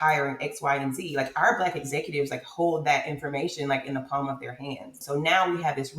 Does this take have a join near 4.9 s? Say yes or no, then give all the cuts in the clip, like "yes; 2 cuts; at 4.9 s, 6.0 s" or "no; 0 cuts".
yes; 1 cut; at 4.9 s